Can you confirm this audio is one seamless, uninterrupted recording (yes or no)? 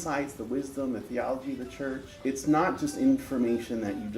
no